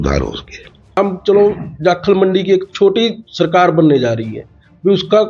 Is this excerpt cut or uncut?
cut